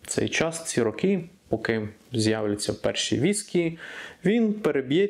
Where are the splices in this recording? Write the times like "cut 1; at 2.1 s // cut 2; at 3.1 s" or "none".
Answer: none